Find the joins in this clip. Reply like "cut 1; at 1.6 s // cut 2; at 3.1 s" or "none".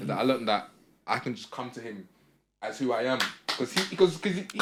none